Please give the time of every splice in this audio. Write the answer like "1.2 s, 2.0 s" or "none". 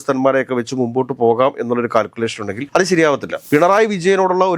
3.3 s